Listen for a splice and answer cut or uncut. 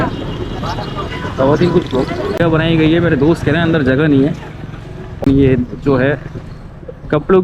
cut